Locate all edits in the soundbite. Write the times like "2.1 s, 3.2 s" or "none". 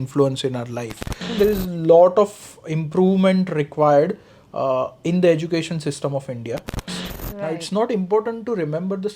1.3 s, 6.9 s